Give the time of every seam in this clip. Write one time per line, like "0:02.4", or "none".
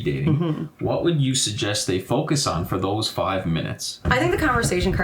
0:03.9